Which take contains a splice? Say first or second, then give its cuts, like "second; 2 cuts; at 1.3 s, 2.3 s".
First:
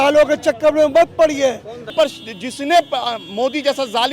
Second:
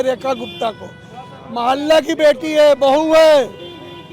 first; 1 cut; at 1.9 s